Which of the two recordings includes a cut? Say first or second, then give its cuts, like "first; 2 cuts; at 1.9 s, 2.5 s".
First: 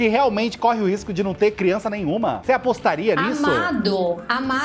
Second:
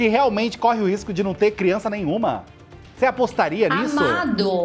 first; 1 cut; at 2.4 s